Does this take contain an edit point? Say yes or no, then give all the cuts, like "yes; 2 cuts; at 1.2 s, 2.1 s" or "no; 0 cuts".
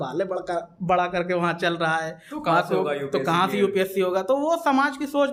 no; 0 cuts